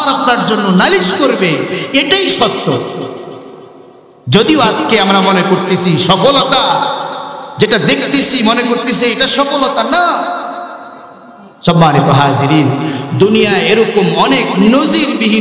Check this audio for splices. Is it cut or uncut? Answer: uncut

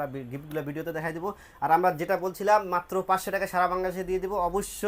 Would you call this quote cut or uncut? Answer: uncut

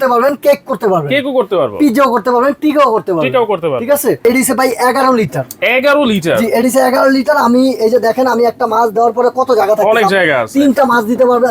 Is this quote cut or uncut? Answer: cut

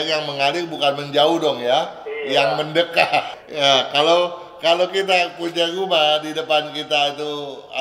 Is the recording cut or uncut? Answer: cut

